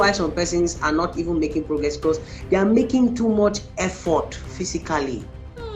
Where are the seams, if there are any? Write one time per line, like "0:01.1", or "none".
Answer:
none

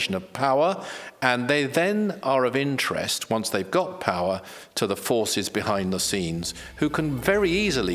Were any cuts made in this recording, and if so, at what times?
none

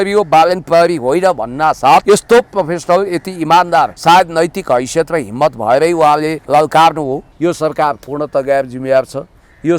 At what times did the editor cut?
0:02.0
0:04.0
0:06.4
0:07.3

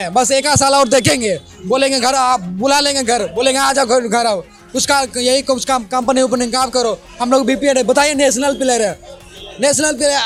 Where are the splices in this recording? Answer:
none

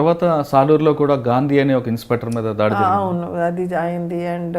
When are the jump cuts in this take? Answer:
none

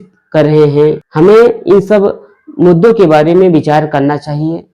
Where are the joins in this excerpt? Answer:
0:01.0

